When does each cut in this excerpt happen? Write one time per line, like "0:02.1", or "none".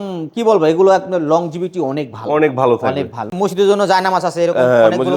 0:03.2